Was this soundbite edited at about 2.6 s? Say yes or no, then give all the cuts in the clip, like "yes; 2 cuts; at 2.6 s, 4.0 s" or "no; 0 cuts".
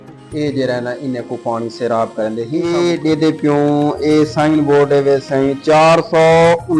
yes; 1 cut; at 2.6 s